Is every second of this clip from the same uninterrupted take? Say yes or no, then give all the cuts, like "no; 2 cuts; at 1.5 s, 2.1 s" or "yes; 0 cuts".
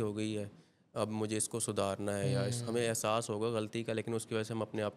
yes; 0 cuts